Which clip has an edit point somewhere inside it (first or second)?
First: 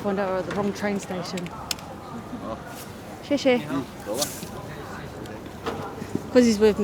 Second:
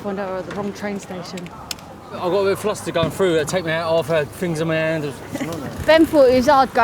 second